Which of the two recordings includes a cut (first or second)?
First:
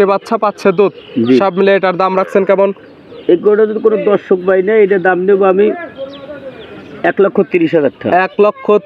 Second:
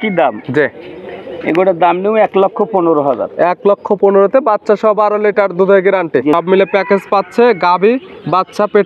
second